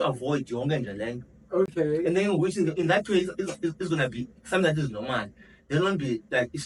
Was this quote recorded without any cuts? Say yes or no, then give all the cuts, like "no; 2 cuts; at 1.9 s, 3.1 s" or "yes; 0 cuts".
yes; 0 cuts